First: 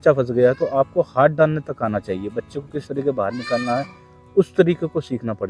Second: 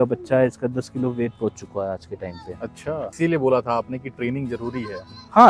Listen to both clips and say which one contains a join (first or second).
second